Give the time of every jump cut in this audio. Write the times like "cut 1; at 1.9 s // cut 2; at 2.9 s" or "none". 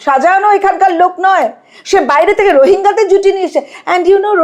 none